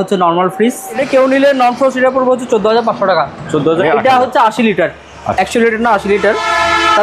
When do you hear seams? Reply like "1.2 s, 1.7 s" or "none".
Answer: 1.0 s, 3.8 s